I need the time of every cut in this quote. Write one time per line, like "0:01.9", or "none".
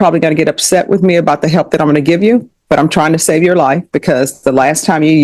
none